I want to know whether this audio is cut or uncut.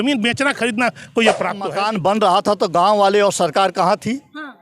cut